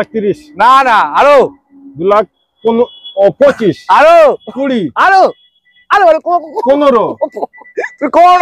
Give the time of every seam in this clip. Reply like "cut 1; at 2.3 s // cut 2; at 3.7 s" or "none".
none